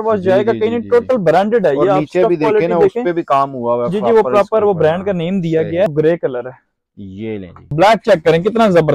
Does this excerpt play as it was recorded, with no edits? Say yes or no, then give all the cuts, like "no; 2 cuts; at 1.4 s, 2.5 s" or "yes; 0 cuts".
no; 2 cuts; at 5.9 s, 7.7 s